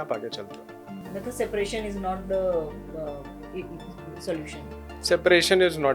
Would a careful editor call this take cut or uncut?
cut